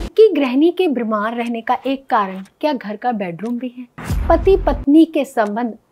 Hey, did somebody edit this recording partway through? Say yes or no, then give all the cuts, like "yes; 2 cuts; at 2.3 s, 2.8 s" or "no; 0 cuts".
no; 0 cuts